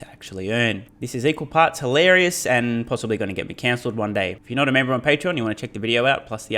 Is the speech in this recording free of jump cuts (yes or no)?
no